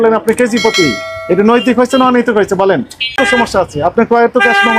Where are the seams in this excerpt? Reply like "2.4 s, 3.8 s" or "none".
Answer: 3.2 s